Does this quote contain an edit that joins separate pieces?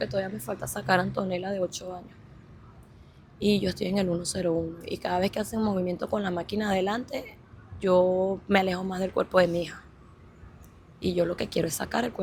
no; 0 cuts

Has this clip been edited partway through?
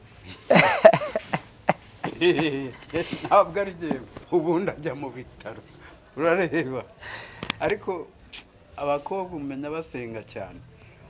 yes; 1 cut; at 4.1 s

